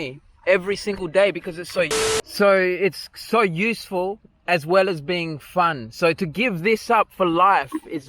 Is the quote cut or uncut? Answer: cut